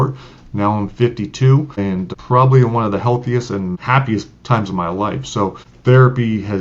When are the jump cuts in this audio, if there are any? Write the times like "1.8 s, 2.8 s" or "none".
2.0 s, 3.8 s, 5.7 s